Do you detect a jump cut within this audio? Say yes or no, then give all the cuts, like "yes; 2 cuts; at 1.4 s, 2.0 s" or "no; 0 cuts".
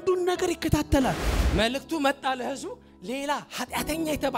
yes; 1 cut; at 1.3 s